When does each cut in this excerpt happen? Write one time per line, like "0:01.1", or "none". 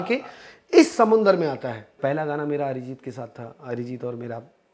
0:02.0